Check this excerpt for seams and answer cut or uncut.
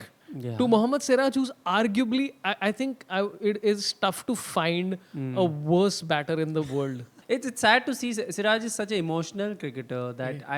cut